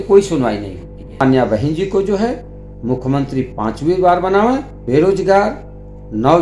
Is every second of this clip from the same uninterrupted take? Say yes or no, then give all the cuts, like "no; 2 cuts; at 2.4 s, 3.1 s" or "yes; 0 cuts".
no; 2 cuts; at 1.2 s, 4.7 s